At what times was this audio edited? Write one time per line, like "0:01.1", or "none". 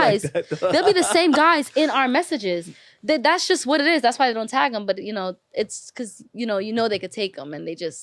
none